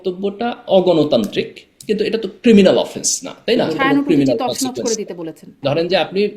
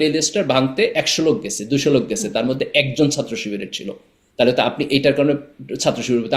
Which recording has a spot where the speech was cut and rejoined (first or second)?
first